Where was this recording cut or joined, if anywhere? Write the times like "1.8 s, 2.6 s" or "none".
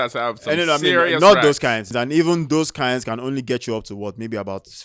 1.9 s